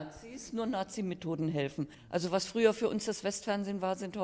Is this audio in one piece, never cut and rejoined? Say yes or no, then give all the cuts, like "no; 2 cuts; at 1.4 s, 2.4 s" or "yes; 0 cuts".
no; 1 cut; at 2.0 s